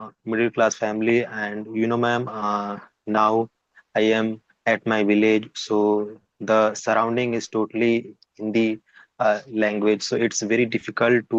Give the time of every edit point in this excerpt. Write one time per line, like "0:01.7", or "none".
none

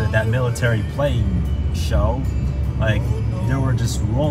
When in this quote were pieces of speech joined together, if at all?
none

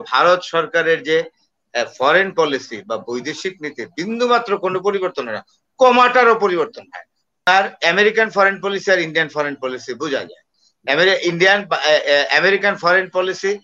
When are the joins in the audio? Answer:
0:07.4

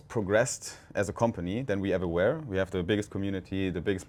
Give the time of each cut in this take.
none

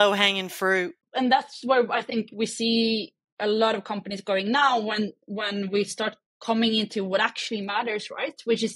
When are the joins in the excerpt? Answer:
0:01.0

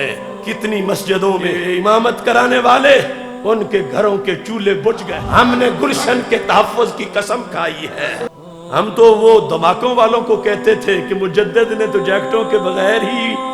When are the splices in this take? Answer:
0:01.6
0:03.2
0:05.1
0:08.3

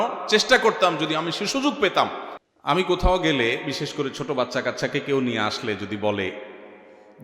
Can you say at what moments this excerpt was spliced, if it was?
0:02.3

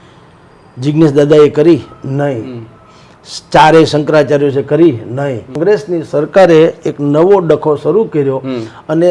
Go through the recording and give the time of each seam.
0:05.6

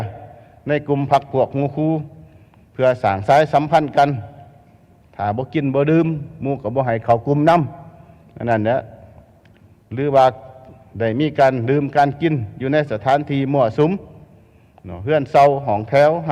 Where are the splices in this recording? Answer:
none

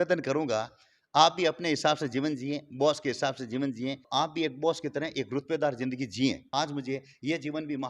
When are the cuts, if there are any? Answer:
0:04.0
0:06.4

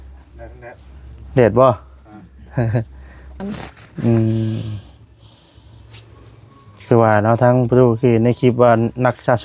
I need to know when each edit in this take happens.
0:03.4

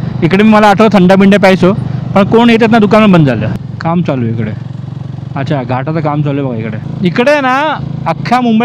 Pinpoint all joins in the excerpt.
0:03.6
0:06.8

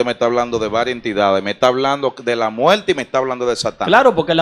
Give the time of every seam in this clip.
none

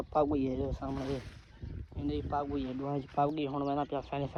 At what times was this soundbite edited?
none

